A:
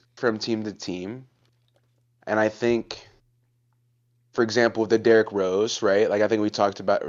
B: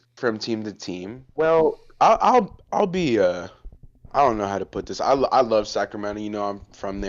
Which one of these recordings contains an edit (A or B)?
B